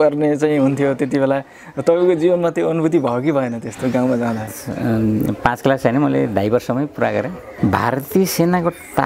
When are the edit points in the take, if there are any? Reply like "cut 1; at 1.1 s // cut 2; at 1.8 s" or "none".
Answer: cut 1; at 4.6 s // cut 2; at 7.4 s